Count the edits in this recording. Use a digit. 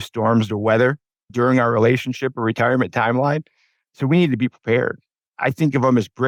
0